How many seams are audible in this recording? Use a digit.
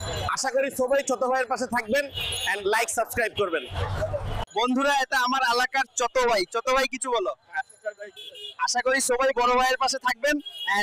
1